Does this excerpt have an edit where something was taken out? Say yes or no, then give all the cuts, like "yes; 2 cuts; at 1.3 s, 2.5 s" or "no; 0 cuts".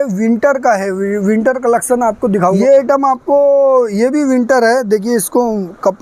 yes; 1 cut; at 2.6 s